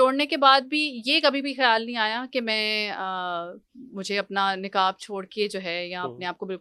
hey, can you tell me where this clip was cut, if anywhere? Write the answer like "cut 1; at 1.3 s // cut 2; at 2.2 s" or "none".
none